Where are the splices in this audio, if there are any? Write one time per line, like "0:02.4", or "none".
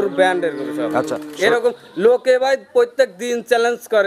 0:01.2

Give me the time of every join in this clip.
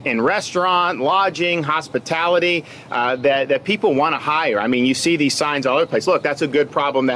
none

